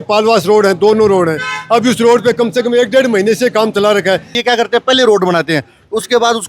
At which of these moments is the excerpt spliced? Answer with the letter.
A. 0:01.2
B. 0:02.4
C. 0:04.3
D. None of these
C